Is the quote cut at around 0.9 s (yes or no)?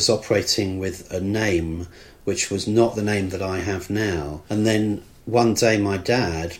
no